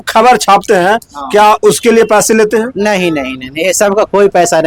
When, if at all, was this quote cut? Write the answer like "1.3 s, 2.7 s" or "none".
none